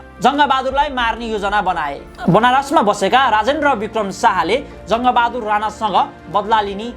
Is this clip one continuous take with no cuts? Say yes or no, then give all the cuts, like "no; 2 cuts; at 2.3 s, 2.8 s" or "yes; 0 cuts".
no; 1 cut; at 2.1 s